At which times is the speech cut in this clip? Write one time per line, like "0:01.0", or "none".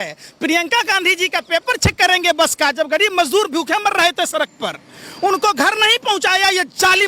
none